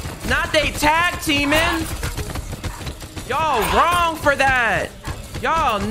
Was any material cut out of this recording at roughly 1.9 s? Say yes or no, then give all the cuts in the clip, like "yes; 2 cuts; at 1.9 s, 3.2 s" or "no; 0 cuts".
no; 0 cuts